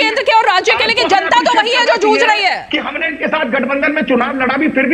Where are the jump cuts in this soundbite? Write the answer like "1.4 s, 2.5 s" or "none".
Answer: none

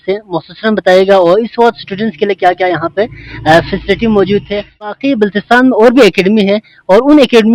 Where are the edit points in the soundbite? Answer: 4.9 s

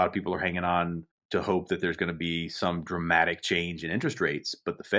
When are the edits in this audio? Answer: 1.1 s

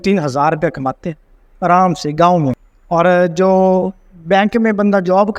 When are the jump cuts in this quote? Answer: 2.7 s

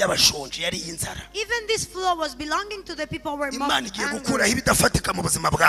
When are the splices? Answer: none

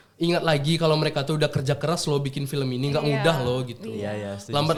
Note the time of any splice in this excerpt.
none

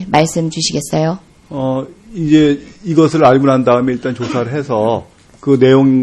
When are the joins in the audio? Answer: none

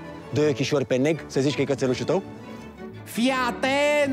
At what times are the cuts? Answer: 2.8 s

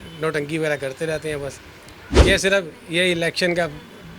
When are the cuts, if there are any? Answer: 2.1 s

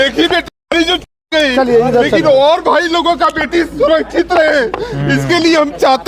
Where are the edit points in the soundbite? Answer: none

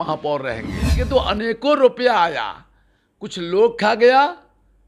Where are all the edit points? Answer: 1.0 s

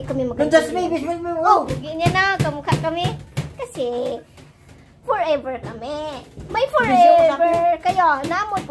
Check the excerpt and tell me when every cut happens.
1.8 s

